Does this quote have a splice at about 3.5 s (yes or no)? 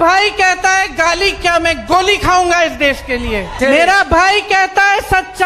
no